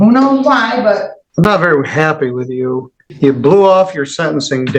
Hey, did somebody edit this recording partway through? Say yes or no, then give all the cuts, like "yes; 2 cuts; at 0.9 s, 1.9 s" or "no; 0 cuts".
yes; 2 cuts; at 1.2 s, 3.0 s